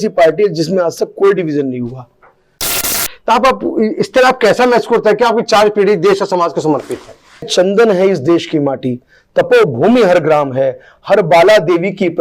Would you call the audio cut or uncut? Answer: cut